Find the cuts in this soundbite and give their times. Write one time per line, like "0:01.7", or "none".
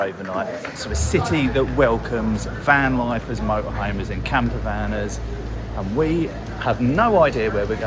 none